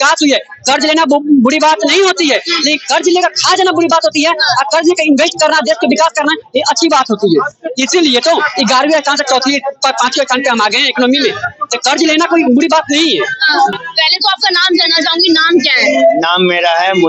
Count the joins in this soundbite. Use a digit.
0